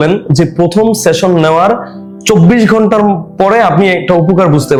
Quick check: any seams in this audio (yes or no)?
no